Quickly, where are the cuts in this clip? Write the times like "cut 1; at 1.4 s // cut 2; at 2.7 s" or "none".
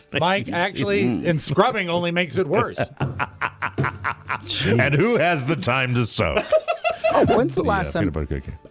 cut 1; at 7.3 s